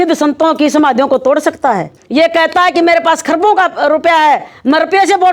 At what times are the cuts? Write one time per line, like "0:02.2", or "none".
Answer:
0:02.0